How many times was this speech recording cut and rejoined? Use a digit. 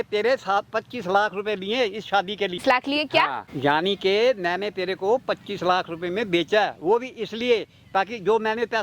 2